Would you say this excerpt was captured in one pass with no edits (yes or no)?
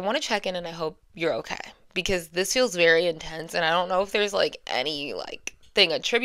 yes